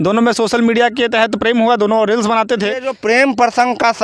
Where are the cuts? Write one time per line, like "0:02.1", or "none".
0:02.9